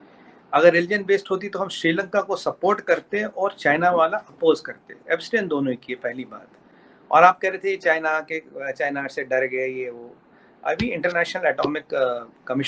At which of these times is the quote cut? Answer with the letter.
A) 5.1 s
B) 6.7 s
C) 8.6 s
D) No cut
D